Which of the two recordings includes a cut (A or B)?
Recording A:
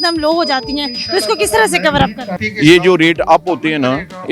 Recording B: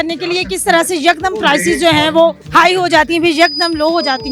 B